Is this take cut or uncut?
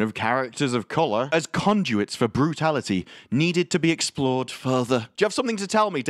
cut